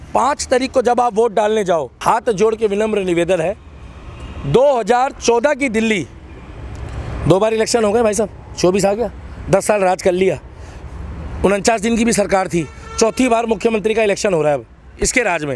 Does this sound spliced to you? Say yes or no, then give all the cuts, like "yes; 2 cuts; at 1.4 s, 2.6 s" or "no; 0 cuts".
yes; 1 cut; at 1.9 s